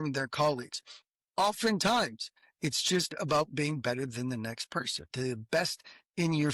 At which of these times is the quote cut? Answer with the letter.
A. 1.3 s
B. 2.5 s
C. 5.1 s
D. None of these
C